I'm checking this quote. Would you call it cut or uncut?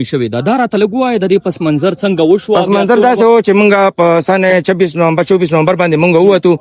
uncut